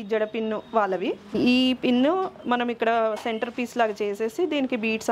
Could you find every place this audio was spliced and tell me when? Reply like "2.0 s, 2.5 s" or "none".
1.3 s